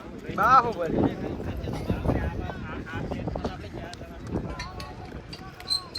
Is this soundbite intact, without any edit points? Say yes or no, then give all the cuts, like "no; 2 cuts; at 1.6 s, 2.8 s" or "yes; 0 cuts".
yes; 0 cuts